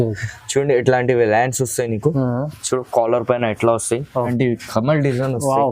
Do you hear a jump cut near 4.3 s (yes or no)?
yes